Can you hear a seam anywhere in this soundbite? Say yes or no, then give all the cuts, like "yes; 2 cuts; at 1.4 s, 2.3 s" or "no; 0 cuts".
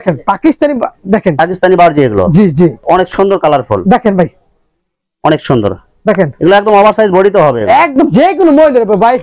yes; 1 cut; at 2.8 s